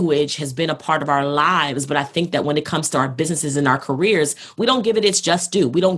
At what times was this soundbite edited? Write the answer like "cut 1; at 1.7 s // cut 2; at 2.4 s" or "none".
none